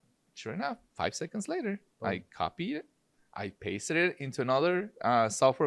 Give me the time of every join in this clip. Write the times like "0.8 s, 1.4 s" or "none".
none

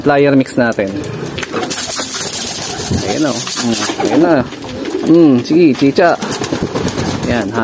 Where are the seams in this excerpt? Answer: 1.3 s

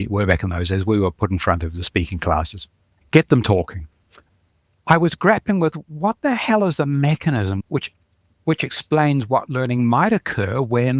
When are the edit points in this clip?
2.9 s, 4.2 s

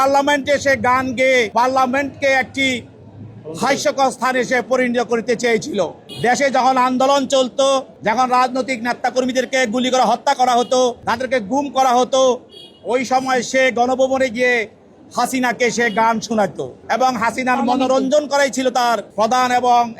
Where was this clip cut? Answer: 1.5 s, 6.0 s, 7.9 s, 11.0 s, 16.7 s, 19.1 s

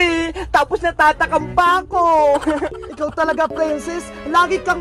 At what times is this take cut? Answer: 2.8 s

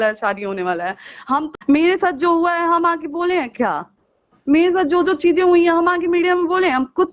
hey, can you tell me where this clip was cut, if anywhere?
1.5 s

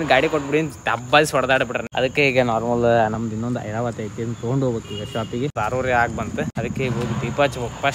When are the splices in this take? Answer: 1.8 s, 5.6 s, 6.5 s

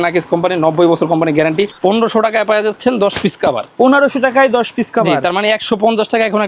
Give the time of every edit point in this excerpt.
1.7 s

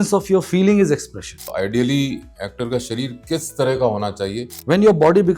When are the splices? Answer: 1.5 s, 4.5 s

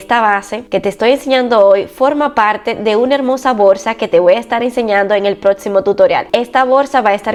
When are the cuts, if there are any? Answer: none

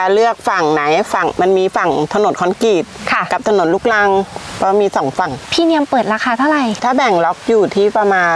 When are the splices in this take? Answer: 5.4 s

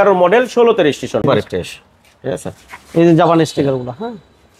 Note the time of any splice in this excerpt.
1.2 s

